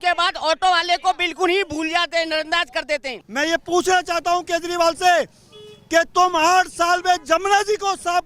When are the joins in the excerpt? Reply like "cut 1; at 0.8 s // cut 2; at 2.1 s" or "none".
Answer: cut 1; at 3.2 s